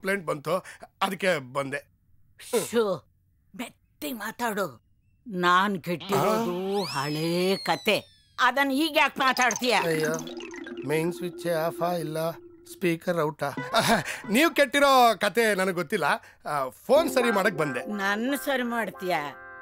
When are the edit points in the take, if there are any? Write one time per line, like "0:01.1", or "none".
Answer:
none